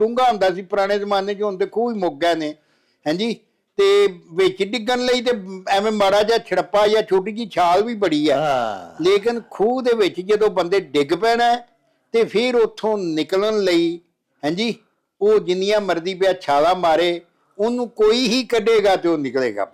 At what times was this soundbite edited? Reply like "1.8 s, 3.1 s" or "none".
none